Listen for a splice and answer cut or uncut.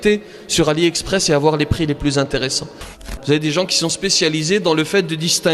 cut